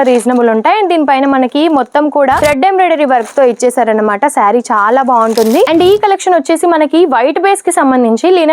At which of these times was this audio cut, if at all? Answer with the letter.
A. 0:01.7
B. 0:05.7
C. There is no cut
B